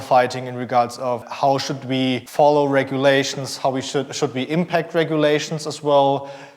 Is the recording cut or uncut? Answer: cut